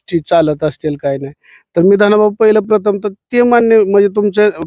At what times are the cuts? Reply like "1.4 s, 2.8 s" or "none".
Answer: none